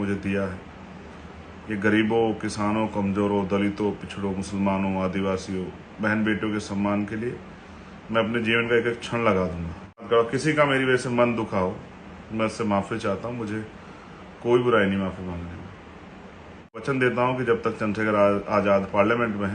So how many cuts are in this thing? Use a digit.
2